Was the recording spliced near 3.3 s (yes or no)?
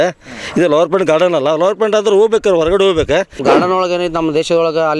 yes